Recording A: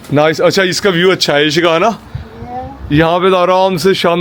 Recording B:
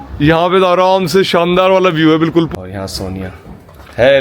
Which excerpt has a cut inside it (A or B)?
B